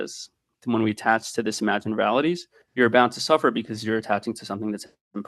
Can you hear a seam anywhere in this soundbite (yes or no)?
yes